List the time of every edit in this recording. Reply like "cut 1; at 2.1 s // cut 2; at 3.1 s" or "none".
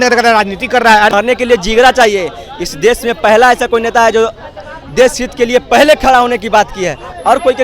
cut 1; at 1.1 s